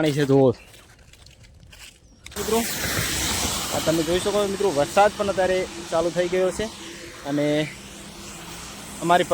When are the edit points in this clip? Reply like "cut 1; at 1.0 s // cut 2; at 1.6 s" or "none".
cut 1; at 2.4 s